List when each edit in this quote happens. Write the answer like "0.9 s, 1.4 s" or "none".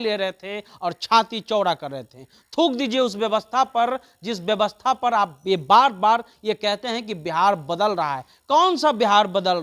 none